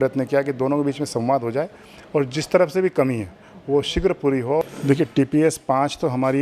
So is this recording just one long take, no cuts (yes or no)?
no